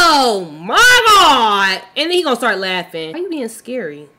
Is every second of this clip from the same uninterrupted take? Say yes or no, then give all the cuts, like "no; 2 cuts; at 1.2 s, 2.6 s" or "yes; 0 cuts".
yes; 0 cuts